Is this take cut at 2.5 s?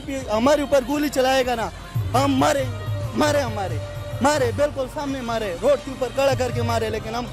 no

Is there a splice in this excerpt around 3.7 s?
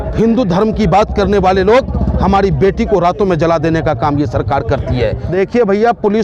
no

